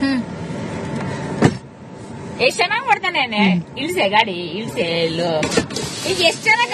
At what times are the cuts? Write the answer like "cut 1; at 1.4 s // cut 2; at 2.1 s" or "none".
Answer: cut 1; at 2.6 s